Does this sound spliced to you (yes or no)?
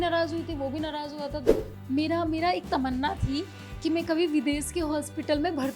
yes